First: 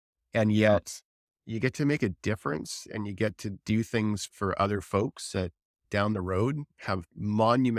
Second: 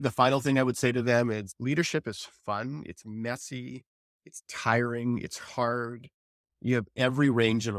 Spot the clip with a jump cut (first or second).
first